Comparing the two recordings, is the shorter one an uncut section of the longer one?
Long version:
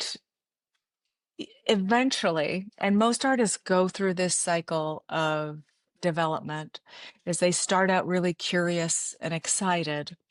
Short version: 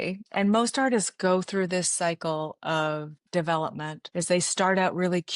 no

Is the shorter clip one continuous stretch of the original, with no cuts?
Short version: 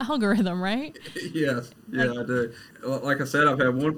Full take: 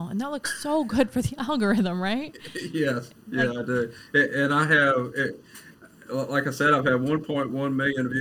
no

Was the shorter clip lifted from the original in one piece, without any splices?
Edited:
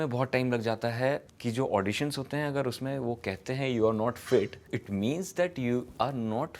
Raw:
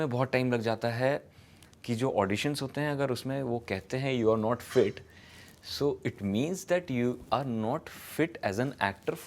no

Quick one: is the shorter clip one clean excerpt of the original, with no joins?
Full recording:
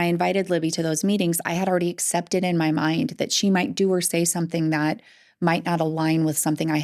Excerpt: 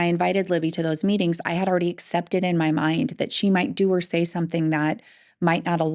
yes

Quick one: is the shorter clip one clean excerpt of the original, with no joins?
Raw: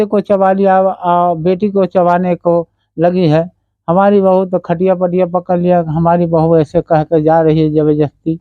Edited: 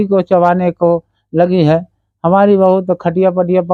yes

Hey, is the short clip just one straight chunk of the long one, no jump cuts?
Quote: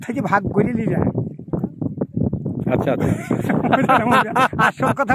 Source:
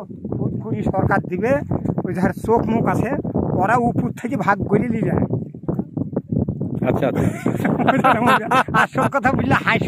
yes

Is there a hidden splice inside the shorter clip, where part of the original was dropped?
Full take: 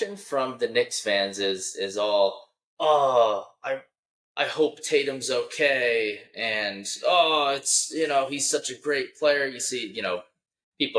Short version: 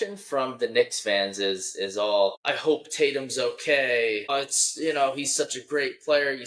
yes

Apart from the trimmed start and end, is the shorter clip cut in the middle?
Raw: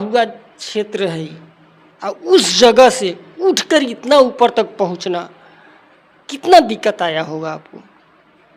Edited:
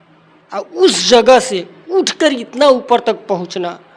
no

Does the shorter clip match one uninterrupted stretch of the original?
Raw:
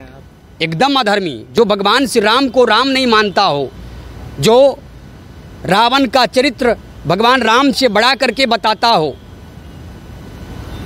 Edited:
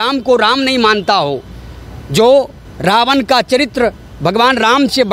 no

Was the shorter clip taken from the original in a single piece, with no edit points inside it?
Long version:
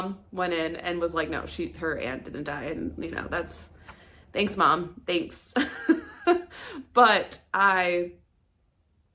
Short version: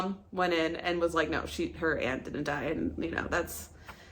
yes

